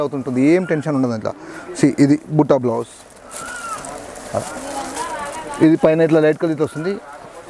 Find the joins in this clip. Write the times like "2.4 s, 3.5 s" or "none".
none